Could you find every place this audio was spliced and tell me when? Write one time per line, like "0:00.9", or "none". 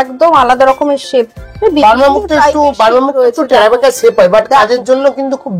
none